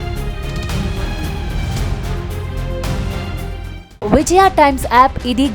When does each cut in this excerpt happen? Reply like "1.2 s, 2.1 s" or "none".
none